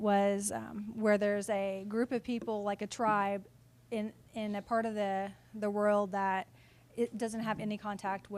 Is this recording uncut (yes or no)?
yes